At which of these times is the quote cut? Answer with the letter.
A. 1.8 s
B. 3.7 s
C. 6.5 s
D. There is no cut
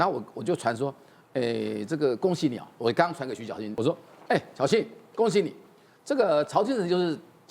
B